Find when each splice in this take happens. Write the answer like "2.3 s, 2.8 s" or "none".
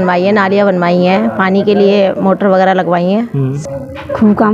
3.6 s